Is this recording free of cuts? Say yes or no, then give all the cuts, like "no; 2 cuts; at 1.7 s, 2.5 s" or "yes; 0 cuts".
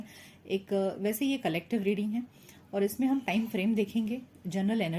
yes; 0 cuts